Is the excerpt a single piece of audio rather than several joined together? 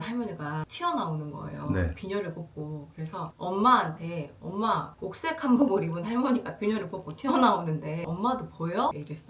yes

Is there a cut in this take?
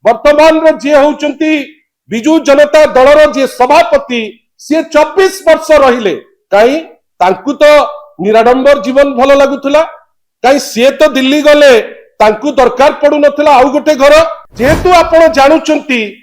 yes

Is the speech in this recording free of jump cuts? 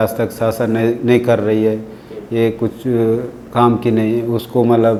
yes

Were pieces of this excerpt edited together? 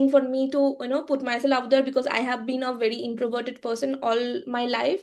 no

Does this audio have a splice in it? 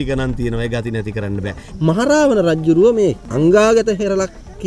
yes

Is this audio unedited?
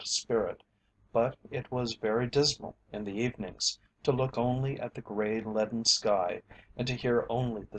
no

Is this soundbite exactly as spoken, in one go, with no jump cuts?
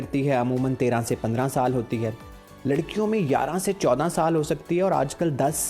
yes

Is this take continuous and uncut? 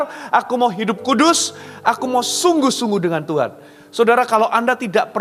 yes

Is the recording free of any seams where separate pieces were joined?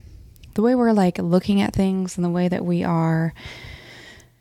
yes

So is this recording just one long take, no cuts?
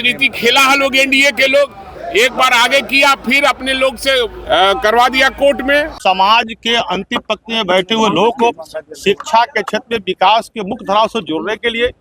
no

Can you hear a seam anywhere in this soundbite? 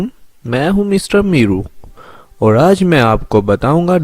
yes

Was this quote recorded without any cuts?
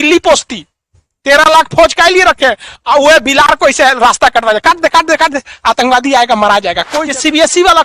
no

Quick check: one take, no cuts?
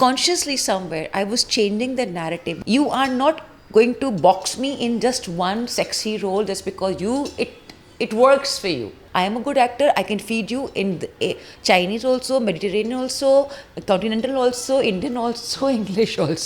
no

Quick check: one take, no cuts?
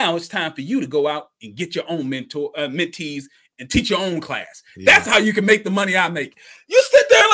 yes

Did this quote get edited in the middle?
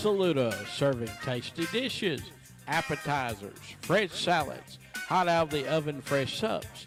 no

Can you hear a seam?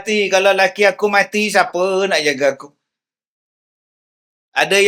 no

